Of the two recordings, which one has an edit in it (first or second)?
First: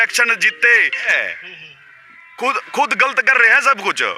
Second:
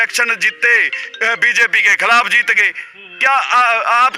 first